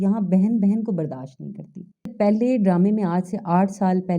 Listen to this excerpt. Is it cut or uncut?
cut